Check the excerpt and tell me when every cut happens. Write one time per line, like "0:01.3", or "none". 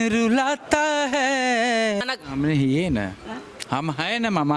0:02.0